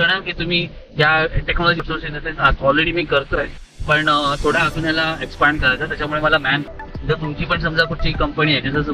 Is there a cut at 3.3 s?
no; 2 cuts; at 1.8 s, 6.6 s

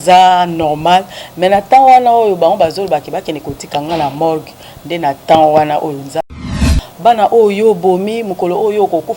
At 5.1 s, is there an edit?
no; 1 cut; at 6.8 s

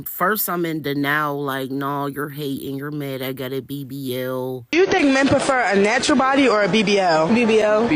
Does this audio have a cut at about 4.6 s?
yes; 1 cut; at 4.6 s

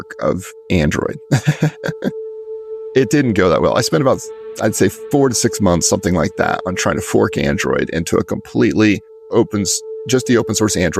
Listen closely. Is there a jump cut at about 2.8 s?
yes; 1 cut; at 2.8 s

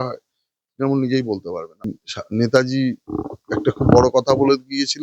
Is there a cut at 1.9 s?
yes; 1 cut; at 1.9 s

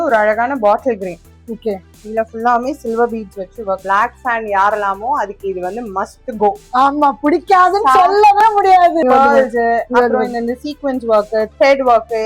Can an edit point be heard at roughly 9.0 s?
yes; 2 cuts; at 3.8 s, 9.0 s

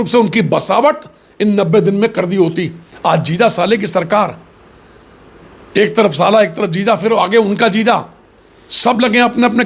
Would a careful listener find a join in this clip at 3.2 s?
yes; 1 cut; at 3.2 s

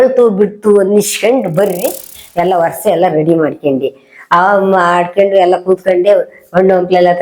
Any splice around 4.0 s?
no; 1 cut; at 2.1 s

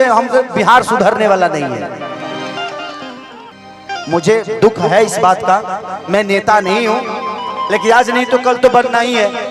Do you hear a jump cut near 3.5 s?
yes; 1 cut; at 3.5 s

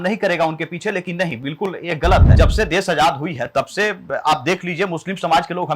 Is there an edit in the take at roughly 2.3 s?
yes; 1 cut; at 2.3 s

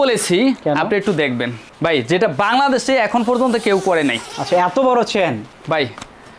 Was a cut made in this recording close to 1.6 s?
no; 1 cut; at 5.5 s

